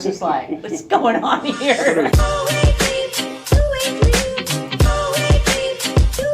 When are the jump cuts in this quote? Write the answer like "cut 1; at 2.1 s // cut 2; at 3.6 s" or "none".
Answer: cut 1; at 2.1 s